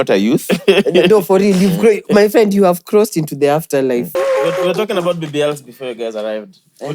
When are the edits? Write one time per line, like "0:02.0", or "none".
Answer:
0:04.1